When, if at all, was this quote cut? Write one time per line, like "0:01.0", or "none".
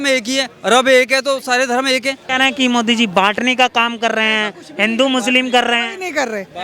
0:02.2